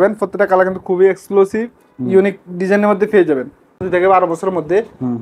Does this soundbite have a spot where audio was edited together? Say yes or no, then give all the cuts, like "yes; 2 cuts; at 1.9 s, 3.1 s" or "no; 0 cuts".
yes; 1 cut; at 3.8 s